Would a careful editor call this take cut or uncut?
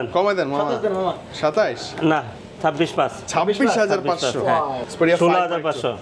uncut